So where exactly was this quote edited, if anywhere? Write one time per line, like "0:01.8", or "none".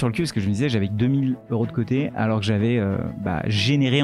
none